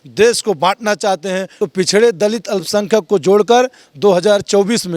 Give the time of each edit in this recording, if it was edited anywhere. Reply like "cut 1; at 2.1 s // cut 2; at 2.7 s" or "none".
cut 1; at 1.5 s